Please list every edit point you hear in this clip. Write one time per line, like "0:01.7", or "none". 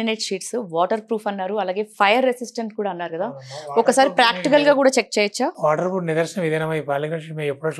none

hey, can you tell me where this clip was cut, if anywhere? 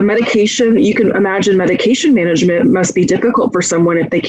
none

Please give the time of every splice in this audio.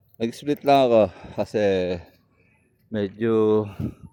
none

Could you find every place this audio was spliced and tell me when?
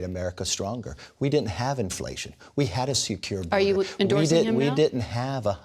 0:01.0

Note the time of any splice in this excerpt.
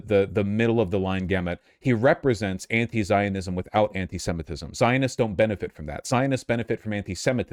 none

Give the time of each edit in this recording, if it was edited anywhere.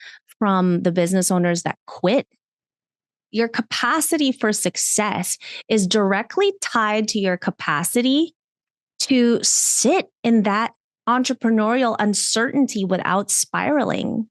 0:03.3

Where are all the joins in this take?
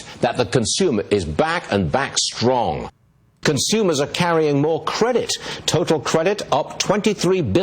0:03.2
0:05.4

